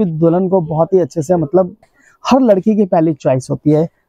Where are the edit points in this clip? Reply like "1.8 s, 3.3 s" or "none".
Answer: 1.9 s

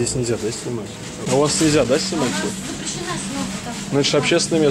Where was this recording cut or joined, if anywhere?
1.2 s

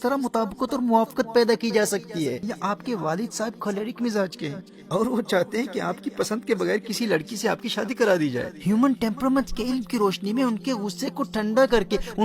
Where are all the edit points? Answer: 2.4 s, 8.5 s

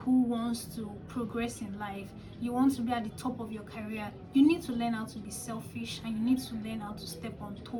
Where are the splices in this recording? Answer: none

